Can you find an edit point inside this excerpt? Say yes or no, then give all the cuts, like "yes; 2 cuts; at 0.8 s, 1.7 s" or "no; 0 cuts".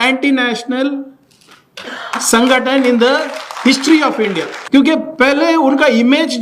yes; 1 cut; at 4.5 s